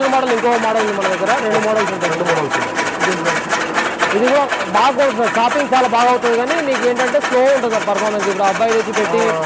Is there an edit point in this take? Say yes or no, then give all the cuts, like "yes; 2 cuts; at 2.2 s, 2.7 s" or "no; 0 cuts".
no; 0 cuts